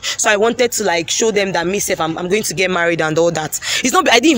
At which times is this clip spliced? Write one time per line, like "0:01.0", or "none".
none